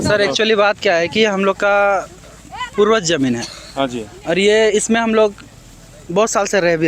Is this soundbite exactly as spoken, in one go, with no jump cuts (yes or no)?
yes